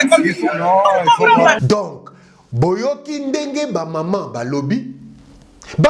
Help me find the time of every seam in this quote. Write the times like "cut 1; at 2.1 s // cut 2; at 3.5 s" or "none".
none